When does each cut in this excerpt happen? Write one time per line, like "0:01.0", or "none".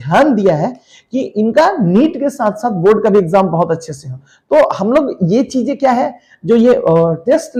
none